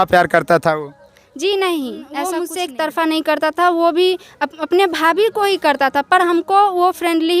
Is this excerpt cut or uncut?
cut